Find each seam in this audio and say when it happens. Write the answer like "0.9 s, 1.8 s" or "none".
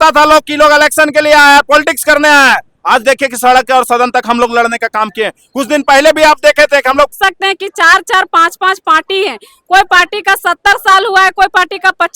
7.1 s